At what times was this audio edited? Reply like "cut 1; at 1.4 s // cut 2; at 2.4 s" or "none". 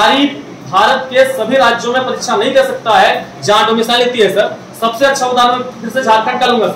none